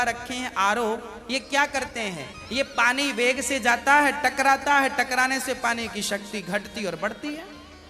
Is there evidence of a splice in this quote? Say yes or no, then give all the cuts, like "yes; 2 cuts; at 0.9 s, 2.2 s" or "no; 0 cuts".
no; 0 cuts